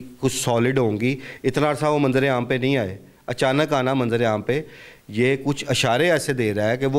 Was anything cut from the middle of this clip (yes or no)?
no